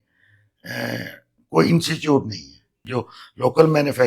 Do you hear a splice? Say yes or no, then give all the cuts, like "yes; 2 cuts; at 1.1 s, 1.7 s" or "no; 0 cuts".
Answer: yes; 1 cut; at 2.8 s